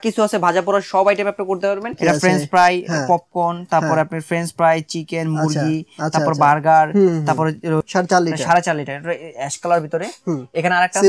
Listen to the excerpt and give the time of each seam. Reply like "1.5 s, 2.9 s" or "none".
1.9 s, 7.8 s